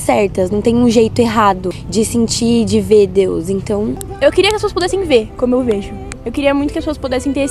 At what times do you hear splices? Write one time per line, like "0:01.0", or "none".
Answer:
0:01.7
0:04.1
0:06.2